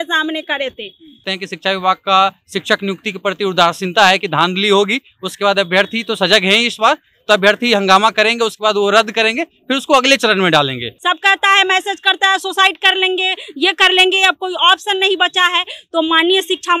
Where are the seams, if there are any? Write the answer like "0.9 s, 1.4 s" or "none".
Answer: 1.2 s, 10.9 s